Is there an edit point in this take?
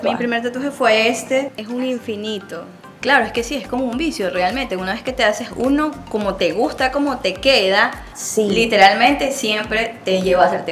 yes; 1 cut; at 3.0 s

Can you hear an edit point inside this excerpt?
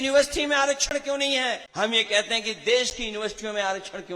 yes; 1 cut; at 1.7 s

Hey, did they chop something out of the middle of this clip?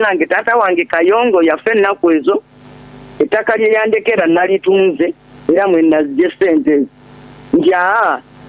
no; 0 cuts

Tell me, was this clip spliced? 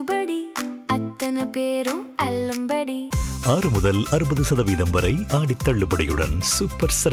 no; 0 cuts

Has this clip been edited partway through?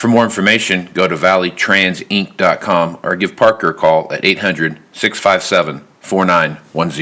no; 0 cuts

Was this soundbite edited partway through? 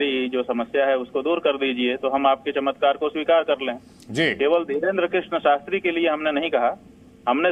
no; 0 cuts

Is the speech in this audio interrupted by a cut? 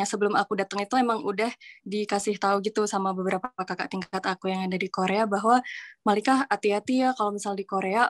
no; 0 cuts

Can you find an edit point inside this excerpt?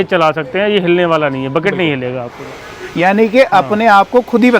yes; 1 cut; at 2.4 s

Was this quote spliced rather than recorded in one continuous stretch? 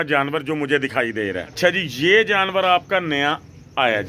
yes; 1 cut; at 1.6 s

